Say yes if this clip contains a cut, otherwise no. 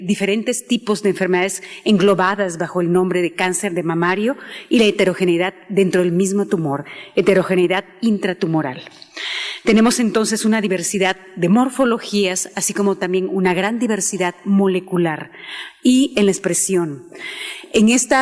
no